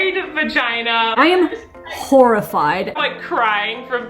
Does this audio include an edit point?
yes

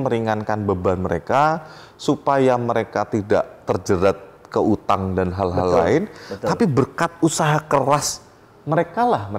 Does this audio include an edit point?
no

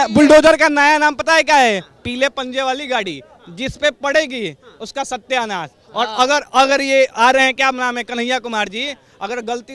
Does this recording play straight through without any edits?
yes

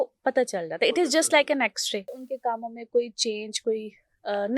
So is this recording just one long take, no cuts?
no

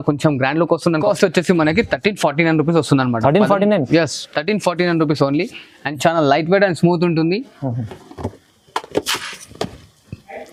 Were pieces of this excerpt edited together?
no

